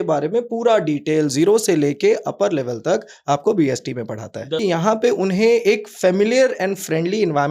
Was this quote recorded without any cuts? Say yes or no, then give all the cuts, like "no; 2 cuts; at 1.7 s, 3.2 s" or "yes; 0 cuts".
no; 1 cut; at 4.6 s